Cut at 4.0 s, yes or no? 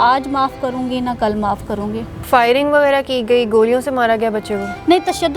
no